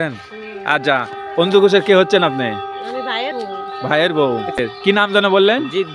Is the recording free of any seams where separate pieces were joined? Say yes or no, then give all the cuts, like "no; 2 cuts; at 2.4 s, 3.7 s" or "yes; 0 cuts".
no; 1 cut; at 4.6 s